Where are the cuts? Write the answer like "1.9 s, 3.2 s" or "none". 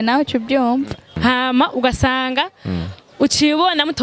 1.1 s